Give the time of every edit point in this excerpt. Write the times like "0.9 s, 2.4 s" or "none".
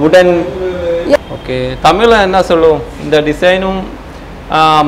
1.2 s